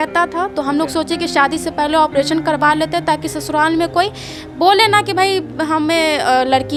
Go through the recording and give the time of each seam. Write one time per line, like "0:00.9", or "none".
none